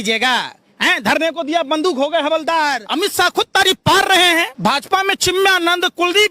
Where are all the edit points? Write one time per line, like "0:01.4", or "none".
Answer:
0:02.8
0:04.5